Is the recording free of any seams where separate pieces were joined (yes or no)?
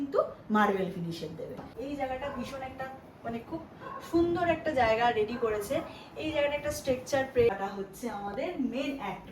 no